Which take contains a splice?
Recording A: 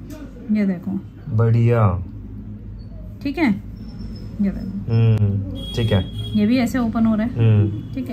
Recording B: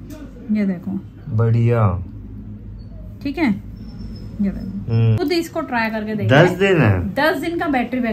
B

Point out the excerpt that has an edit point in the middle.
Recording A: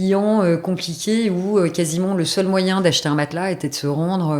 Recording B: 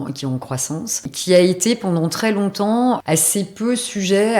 B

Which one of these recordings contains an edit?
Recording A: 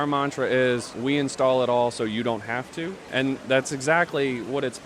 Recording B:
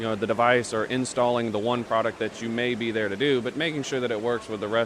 A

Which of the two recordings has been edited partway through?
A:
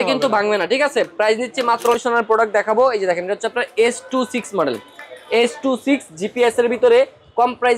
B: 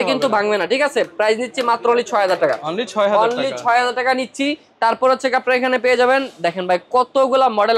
A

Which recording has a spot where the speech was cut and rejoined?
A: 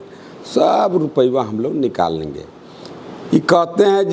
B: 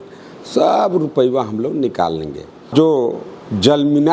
B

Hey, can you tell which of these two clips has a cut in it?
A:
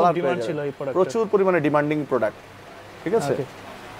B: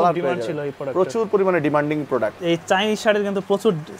B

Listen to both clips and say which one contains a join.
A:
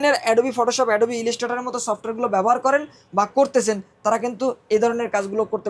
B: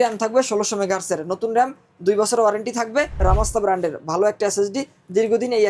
B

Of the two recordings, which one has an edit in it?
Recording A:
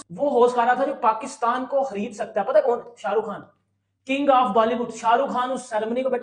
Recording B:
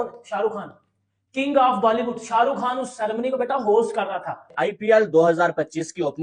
B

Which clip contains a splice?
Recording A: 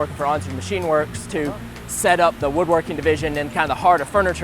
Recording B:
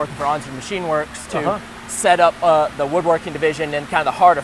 A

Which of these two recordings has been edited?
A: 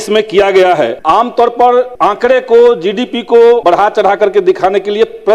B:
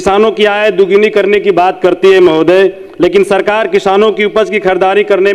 A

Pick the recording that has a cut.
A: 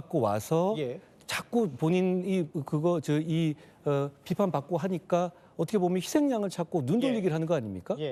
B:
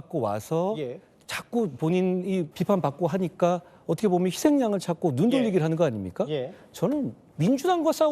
B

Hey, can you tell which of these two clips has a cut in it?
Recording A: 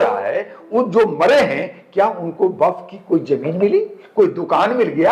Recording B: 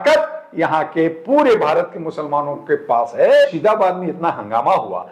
B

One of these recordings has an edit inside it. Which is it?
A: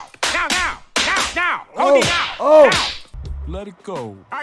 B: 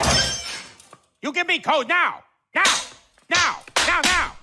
A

